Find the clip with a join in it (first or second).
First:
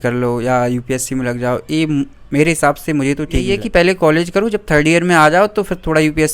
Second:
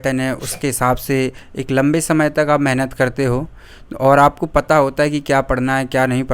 first